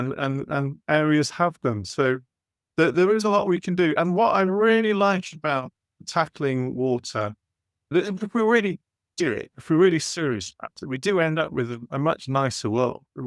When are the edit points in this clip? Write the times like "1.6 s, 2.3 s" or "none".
7.9 s